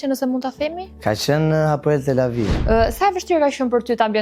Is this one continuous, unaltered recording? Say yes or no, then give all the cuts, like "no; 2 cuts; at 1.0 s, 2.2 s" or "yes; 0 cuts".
no; 2 cuts; at 0.9 s, 2.6 s